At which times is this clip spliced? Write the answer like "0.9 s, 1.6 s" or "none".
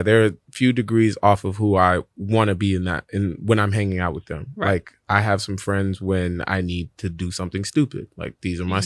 none